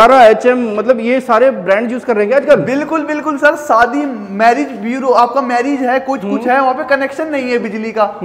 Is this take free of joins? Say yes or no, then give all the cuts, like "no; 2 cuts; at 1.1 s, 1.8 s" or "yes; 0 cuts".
yes; 0 cuts